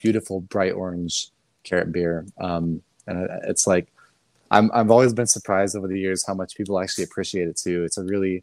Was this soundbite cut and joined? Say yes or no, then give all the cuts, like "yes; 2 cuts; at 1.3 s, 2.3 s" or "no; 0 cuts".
no; 0 cuts